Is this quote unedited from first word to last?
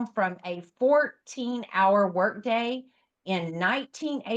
yes; 0 cuts

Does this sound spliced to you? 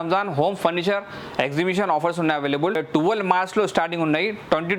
yes; 1 cut; at 2.8 s

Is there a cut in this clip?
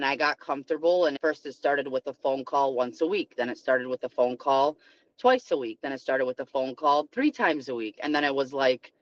no; 0 cuts

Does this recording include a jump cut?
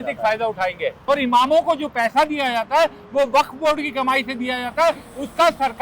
yes; 1 cut; at 1.0 s

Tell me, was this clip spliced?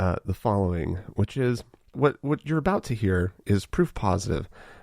yes; 1 cut; at 2.0 s

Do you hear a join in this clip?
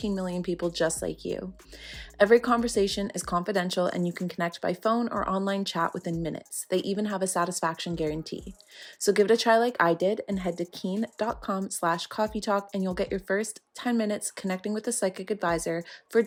no; 0 cuts

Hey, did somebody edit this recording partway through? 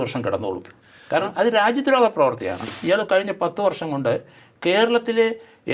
yes; 1 cut; at 2.7 s

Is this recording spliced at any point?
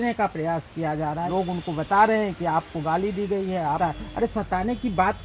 yes; 2 cuts; at 1.3 s, 3.8 s

